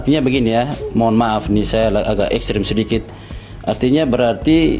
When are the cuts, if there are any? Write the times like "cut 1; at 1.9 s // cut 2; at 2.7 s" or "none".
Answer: none